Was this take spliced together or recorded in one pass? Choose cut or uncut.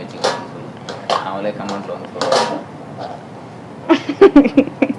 uncut